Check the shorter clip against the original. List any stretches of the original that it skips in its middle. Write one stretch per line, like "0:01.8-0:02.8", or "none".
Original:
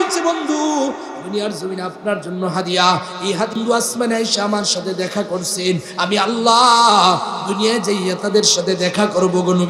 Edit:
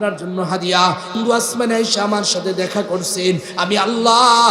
0:03.2-0:03.5